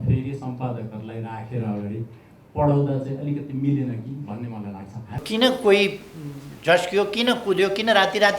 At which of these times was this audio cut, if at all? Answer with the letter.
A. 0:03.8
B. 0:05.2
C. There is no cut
B